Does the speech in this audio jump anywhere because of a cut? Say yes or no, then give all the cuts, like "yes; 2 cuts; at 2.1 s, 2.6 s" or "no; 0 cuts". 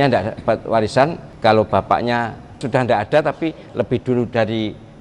yes; 2 cuts; at 1.2 s, 2.6 s